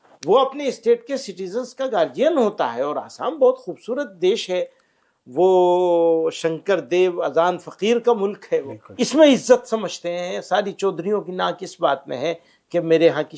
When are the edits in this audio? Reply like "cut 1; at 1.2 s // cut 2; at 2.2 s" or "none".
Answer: cut 1; at 8.9 s